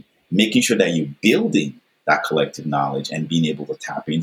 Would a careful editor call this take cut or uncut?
uncut